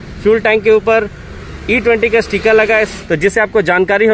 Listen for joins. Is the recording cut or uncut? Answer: cut